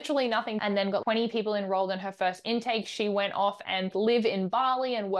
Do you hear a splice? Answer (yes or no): yes